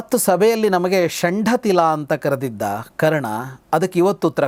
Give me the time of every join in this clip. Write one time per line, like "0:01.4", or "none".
none

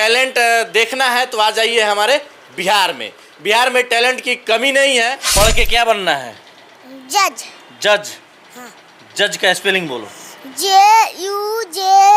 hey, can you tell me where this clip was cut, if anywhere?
0:05.2

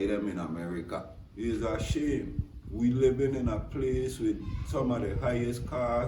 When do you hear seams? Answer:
0:01.2

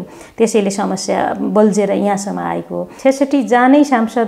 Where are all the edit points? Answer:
0:02.8

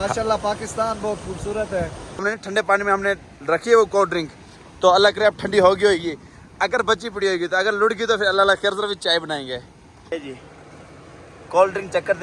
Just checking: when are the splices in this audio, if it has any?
0:02.2
0:10.1

